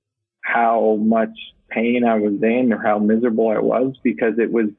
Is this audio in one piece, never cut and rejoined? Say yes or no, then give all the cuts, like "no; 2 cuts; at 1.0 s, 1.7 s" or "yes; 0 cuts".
yes; 0 cuts